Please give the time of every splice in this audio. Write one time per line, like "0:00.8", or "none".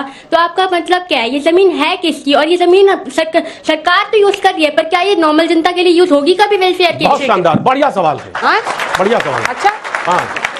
none